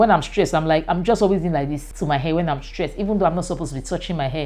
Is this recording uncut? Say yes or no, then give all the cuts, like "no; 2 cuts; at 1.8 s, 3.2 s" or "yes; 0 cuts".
no; 1 cut; at 1.9 s